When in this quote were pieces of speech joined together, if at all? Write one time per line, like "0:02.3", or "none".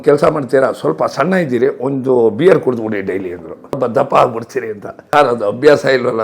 0:03.8
0:04.9